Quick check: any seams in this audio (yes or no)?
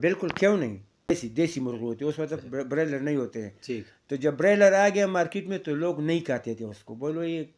yes